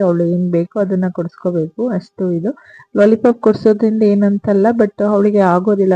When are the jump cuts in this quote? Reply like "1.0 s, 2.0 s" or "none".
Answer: none